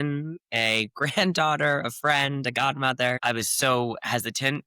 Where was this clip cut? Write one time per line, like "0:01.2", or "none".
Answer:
0:03.2